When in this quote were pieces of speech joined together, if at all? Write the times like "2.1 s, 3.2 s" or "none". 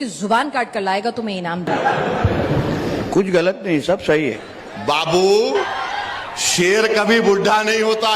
1.7 s, 4.4 s, 5.7 s